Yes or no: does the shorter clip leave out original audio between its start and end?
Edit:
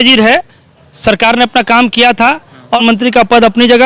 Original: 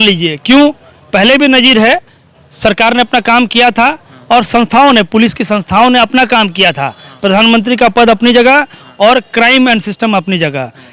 yes